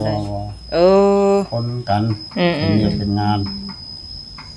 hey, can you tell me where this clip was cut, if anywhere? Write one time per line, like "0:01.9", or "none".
0:01.8